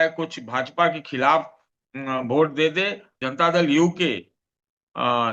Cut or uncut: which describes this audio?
cut